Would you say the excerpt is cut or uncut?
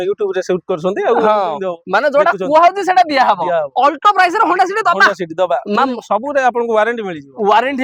uncut